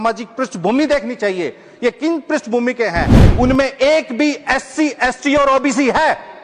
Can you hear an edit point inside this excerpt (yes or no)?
yes